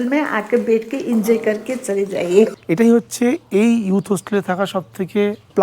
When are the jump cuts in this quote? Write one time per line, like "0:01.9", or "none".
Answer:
0:02.5